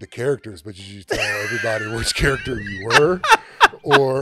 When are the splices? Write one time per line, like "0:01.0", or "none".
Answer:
none